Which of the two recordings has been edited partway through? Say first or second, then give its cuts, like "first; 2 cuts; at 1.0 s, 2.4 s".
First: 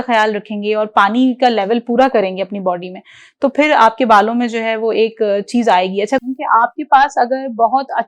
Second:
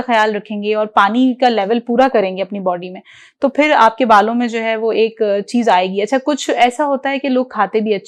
first; 1 cut; at 6.2 s